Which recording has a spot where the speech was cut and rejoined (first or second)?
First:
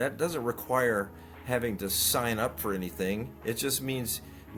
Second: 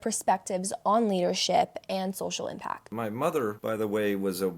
second